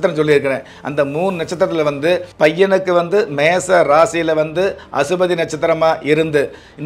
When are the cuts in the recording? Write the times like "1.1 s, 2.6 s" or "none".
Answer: 2.3 s